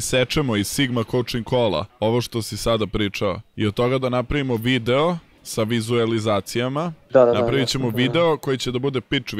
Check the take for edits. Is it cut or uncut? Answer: cut